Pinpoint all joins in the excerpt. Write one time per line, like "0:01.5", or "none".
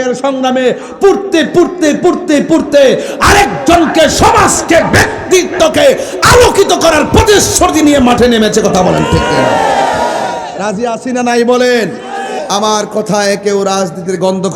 0:12.4